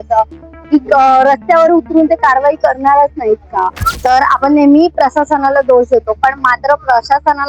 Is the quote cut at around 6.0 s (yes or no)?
no